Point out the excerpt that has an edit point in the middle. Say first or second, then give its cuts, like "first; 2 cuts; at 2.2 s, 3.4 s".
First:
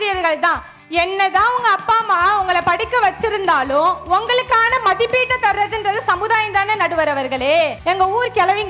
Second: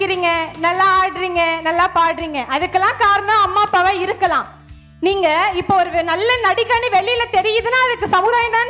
first; 1 cut; at 7.8 s